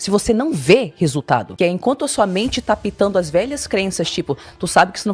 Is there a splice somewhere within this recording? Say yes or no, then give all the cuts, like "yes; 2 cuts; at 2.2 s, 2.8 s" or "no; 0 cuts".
yes; 1 cut; at 1.5 s